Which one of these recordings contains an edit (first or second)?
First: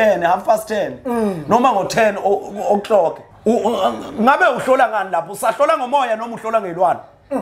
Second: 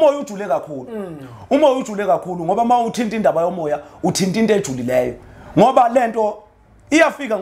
first